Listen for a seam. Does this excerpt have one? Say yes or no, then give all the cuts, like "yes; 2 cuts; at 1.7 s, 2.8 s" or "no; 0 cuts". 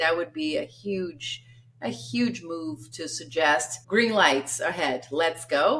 yes; 1 cut; at 3.8 s